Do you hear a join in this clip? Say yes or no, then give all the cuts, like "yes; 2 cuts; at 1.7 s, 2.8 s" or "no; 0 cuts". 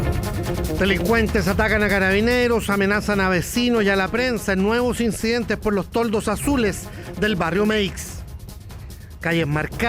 yes; 1 cut; at 0.9 s